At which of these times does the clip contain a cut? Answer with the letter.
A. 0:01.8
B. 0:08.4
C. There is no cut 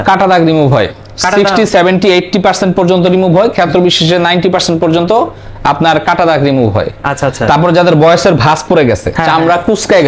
C